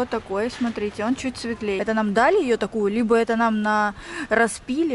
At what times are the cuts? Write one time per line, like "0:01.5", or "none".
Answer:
0:01.8